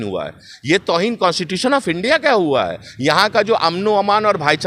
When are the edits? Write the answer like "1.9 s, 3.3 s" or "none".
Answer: none